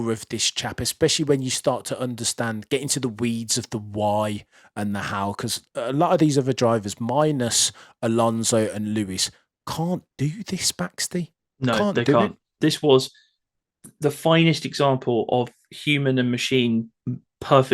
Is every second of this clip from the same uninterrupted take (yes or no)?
no